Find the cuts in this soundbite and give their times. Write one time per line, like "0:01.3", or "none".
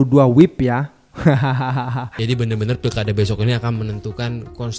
0:02.1